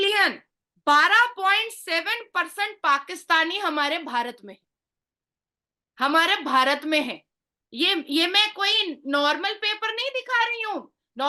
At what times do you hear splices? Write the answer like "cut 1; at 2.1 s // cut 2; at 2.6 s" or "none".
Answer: none